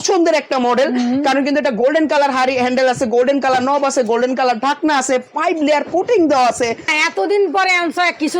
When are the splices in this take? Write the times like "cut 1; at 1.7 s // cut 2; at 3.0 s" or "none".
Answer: cut 1; at 6.9 s